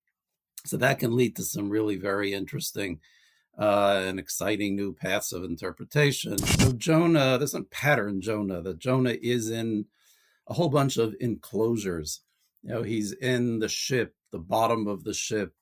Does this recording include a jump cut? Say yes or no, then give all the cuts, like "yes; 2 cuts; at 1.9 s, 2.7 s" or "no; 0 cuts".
yes; 1 cut; at 6.5 s